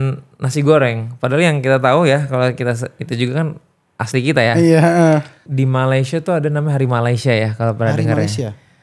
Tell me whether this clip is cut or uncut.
cut